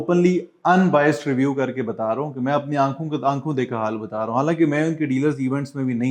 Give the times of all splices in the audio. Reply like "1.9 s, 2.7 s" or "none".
none